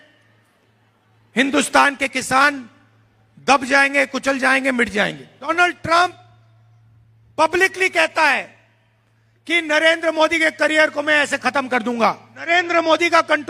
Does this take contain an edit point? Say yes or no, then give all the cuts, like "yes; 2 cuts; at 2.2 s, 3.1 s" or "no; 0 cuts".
yes; 2 cuts; at 5.5 s, 12.5 s